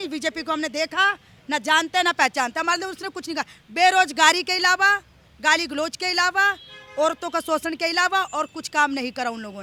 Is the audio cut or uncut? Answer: uncut